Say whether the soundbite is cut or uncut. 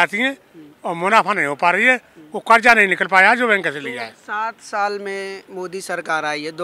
uncut